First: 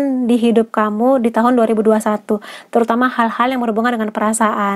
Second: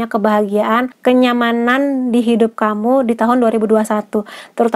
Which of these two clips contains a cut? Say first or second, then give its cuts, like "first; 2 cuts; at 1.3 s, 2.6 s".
second; 1 cut; at 0.9 s